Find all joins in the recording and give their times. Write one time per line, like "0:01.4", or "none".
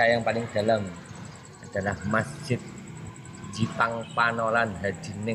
none